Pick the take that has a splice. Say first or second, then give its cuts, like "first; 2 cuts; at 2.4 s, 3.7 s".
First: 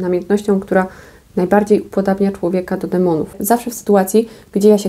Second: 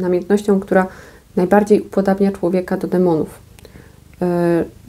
first; 1 cut; at 3.4 s